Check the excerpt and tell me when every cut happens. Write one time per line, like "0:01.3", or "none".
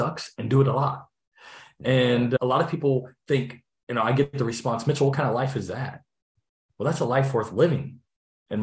none